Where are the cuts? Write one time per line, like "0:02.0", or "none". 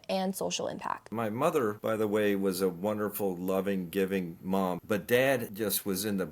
0:01.1
0:01.8
0:04.8
0:05.5